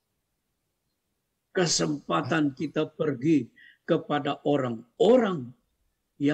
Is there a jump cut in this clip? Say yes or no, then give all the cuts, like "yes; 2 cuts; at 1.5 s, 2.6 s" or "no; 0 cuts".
no; 0 cuts